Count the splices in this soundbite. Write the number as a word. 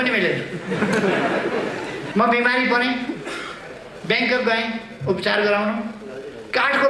one